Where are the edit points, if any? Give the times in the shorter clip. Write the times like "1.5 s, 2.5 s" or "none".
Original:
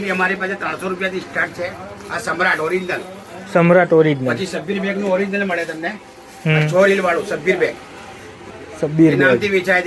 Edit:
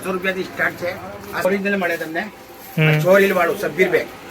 1.4 s